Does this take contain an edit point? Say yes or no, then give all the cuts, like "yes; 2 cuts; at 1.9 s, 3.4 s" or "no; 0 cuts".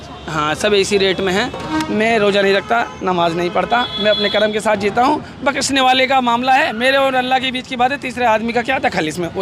yes; 1 cut; at 1.7 s